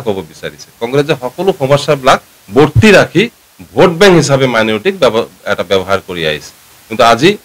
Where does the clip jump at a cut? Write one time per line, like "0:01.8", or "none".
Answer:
none